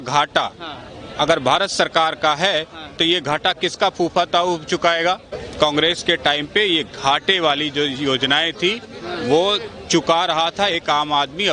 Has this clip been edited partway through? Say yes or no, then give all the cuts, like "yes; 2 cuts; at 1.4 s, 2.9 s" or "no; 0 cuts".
yes; 1 cut; at 5.4 s